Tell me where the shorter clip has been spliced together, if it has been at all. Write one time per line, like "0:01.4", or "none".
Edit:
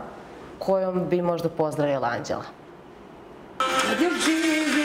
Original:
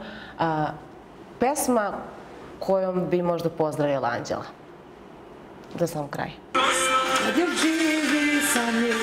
0:03.6